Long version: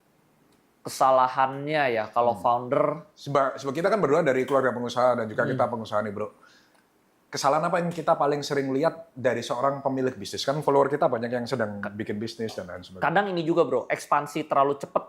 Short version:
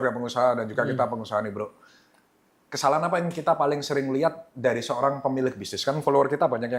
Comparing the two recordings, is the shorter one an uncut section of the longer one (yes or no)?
yes